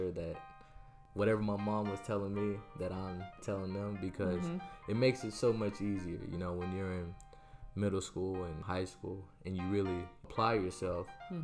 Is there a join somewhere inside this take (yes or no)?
yes